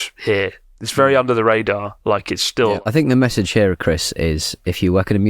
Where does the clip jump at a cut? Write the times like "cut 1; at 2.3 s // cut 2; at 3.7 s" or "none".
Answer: cut 1; at 2.8 s